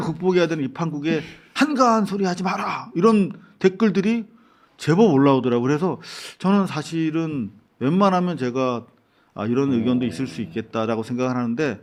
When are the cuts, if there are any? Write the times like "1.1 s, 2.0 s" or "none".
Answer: none